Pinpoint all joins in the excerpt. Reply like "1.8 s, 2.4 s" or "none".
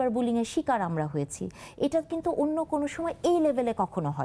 none